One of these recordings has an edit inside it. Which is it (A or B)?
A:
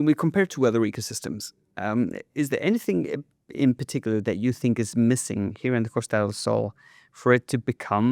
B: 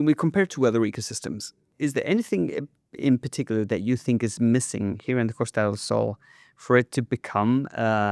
B